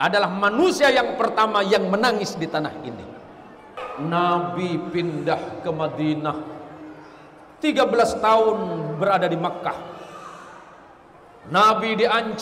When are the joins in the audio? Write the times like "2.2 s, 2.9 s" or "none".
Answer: 3.8 s